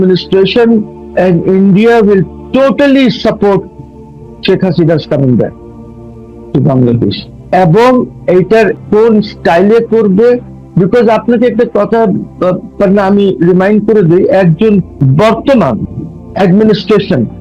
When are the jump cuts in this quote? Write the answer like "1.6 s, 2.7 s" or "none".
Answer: 1.0 s, 7.5 s, 8.7 s, 15.0 s